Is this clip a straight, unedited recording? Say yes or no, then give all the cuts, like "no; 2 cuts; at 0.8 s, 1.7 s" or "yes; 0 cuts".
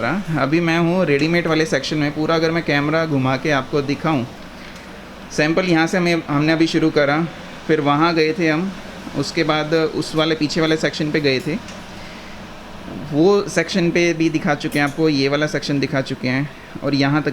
no; 1 cut; at 4.3 s